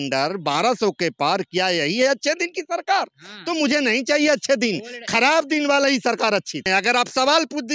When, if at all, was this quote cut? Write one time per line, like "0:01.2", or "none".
0:06.7